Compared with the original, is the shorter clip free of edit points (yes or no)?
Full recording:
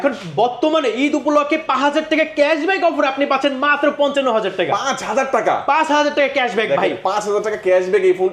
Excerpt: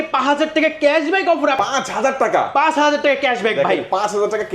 no